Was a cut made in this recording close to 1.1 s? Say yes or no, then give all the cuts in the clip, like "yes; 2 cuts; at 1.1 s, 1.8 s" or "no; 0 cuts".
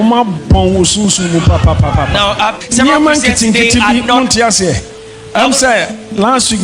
no; 2 cuts; at 2.6 s, 4.9 s